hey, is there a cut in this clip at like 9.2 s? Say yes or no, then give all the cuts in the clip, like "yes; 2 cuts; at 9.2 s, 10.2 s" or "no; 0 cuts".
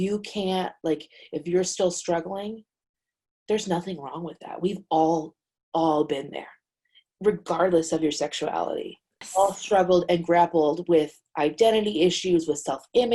yes; 1 cut; at 9.2 s